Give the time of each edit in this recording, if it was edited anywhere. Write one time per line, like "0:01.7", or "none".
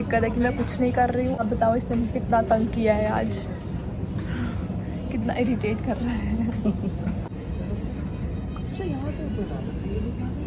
none